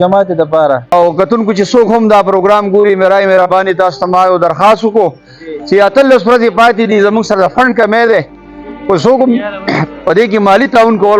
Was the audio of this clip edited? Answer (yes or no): yes